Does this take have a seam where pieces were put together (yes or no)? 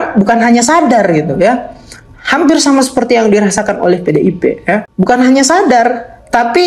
yes